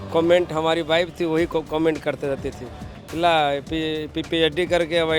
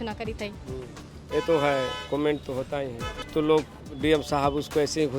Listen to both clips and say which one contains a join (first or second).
second